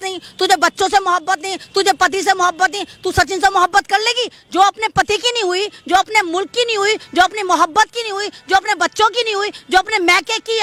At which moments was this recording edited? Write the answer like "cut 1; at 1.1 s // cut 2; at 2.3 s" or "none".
none